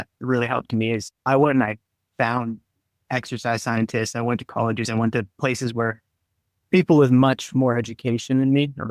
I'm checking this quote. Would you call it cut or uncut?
uncut